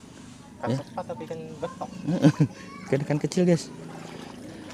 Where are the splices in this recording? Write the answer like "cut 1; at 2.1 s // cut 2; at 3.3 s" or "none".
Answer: none